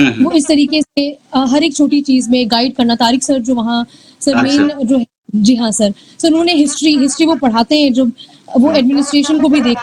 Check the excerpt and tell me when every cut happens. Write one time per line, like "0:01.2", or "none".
none